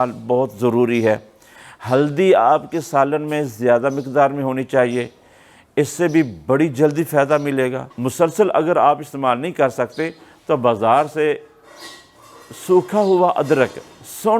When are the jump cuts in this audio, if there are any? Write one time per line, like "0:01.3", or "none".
0:07.9